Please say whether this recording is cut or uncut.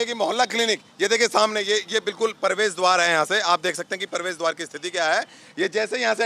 uncut